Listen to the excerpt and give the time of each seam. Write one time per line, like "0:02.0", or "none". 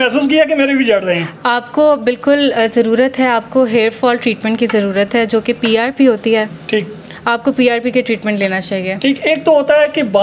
none